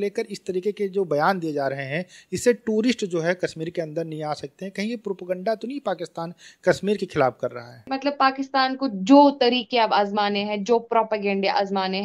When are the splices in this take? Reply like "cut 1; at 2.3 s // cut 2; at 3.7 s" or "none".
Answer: cut 1; at 7.8 s